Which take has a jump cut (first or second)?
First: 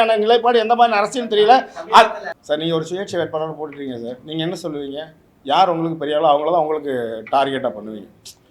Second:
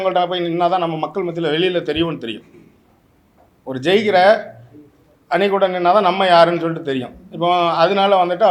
first